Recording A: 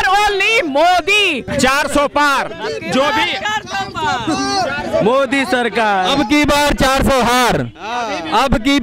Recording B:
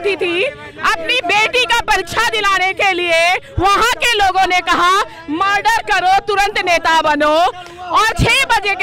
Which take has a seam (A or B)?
A